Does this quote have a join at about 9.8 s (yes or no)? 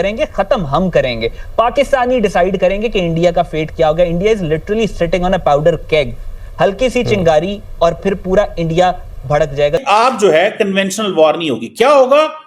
yes